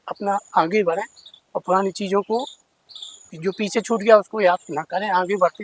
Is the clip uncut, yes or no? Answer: yes